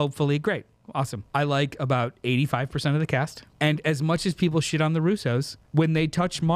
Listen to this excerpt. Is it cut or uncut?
cut